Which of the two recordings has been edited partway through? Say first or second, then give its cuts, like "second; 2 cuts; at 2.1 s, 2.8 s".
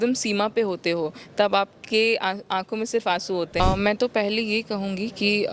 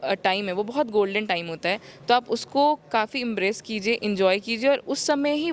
first; 1 cut; at 3.6 s